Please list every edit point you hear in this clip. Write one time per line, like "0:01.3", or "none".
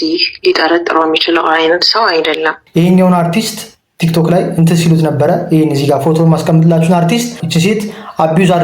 0:02.6
0:07.4